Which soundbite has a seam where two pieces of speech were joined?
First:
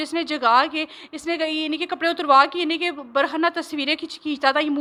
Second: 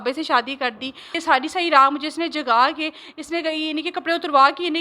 second; 1 cut; at 1.1 s

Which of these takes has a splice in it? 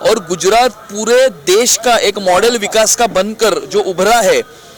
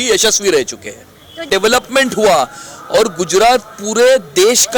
second; 1 cut; at 1.5 s

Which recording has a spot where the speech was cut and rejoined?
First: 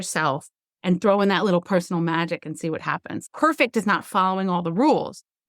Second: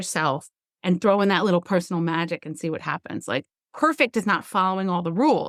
first; 1 cut; at 3.2 s

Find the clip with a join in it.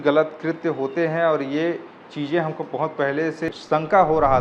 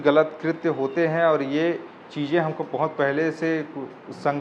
first; 1 cut; at 3.5 s

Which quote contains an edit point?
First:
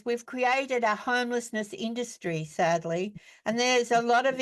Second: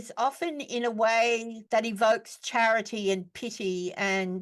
second; 1 cut; at 1.5 s

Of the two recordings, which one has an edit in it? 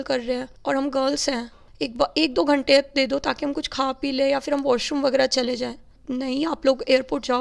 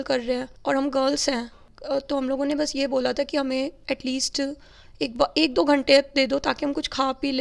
first; 2 cuts; at 1.6 s, 5.9 s

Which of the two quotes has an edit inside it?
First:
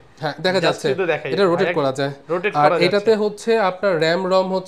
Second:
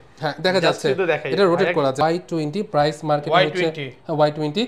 second; 1 cut; at 2.0 s

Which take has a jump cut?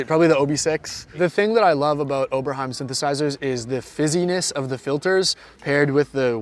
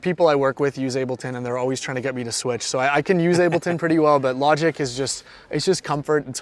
first; 1 cut; at 1.1 s

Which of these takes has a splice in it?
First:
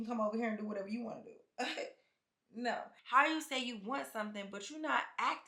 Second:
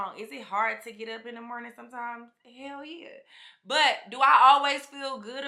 first; 1 cut; at 2.9 s

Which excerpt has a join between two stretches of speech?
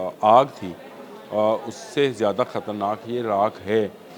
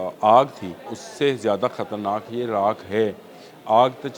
second; 1 cut; at 1.0 s

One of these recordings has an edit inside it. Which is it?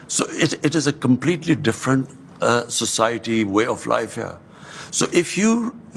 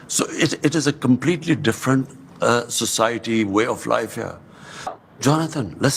second; 1 cut; at 4.9 s

